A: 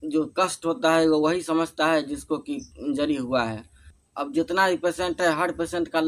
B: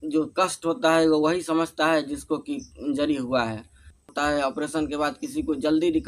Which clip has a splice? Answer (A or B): B